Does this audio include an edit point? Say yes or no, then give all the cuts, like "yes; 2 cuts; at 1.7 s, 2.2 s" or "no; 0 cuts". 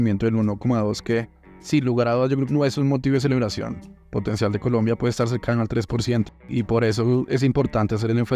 yes; 2 cuts; at 2.5 s, 6.5 s